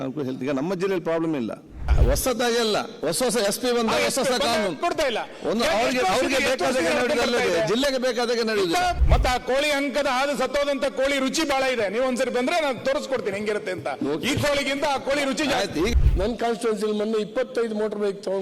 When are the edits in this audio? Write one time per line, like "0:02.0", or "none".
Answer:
0:02.0
0:09.0
0:15.9